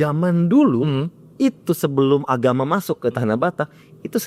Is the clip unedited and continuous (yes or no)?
yes